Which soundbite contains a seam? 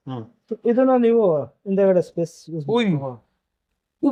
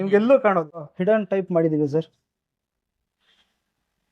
second; 1 cut; at 0.9 s

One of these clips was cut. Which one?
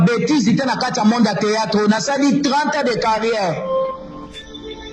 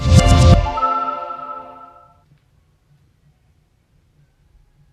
second; 1 cut; at 1.8 s

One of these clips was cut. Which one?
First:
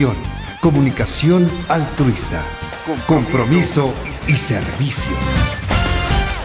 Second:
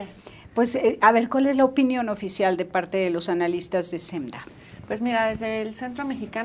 second; 1 cut; at 5.5 s

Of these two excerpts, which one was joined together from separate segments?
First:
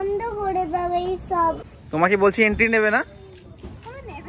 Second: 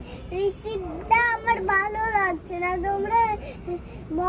first; 1 cut; at 1.7 s

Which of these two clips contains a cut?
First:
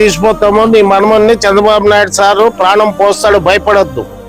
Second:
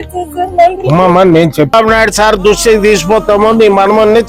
second; 1 cut; at 1.7 s

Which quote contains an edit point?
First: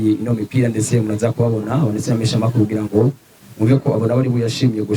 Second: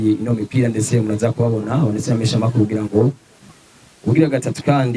second; 1 cut; at 3.5 s

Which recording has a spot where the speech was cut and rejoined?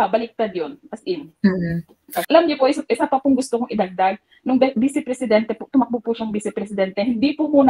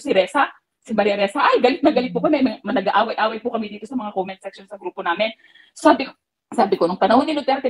first; 1 cut; at 2.2 s

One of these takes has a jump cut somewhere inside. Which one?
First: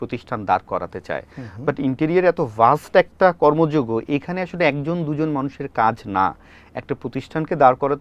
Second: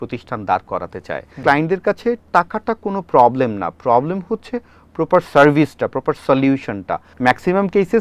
second; 2 cuts; at 1.4 s, 7.1 s

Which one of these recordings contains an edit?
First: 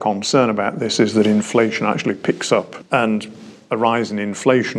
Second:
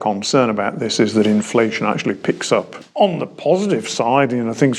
second; 1 cut; at 2.8 s

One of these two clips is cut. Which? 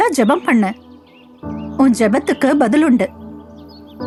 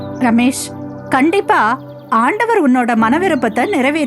second; 1 cut; at 1.9 s

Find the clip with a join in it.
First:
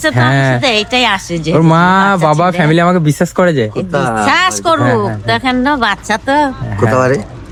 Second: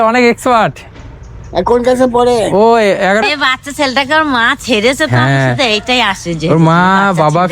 second; 1 cut; at 3.2 s

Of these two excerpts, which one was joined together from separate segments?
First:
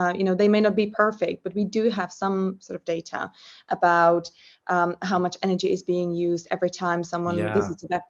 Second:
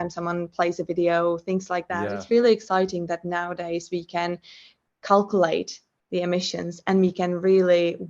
second; 1 cut; at 2.2 s

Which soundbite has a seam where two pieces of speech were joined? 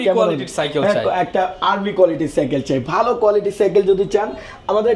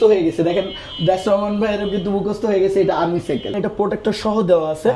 second; 1 cut; at 3.6 s

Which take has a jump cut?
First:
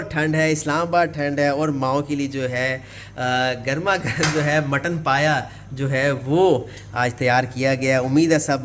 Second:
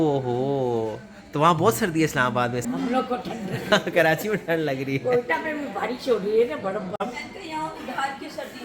second; 2 cuts; at 2.6 s, 7.0 s

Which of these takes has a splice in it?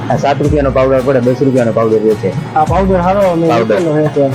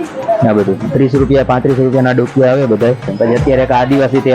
second; 1 cut; at 3.1 s

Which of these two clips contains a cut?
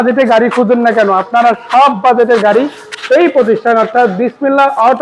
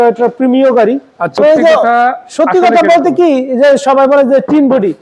second; 1 cut; at 1.2 s

